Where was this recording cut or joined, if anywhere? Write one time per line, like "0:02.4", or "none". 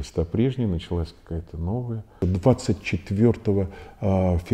0:02.1